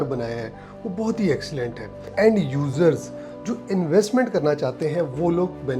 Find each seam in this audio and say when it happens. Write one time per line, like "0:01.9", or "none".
0:02.1